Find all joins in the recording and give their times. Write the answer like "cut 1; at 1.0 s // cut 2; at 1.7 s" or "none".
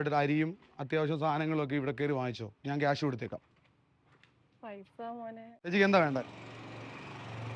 none